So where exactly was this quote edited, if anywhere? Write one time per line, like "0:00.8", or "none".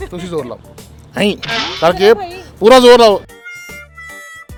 none